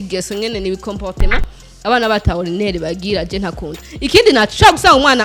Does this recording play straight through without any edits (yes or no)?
yes